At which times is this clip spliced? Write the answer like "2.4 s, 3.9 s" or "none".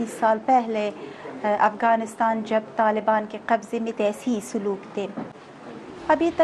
5.4 s